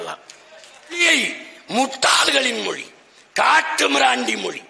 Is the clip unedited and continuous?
no; 1 cut; at 1.0 s

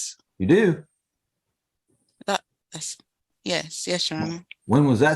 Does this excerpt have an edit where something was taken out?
no; 0 cuts

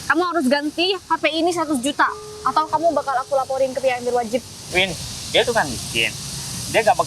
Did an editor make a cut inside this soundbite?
yes; 1 cut; at 4.6 s

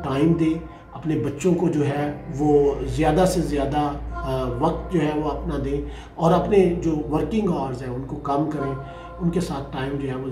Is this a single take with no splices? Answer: yes; 0 cuts

